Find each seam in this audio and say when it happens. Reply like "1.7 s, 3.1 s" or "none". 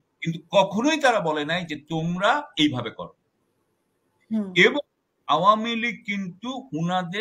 none